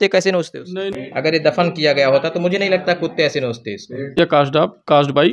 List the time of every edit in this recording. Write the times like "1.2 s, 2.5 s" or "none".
0.9 s, 4.1 s